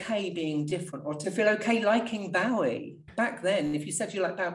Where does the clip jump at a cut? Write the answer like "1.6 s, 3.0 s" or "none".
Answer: 3.0 s